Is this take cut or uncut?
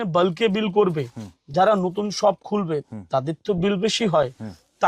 uncut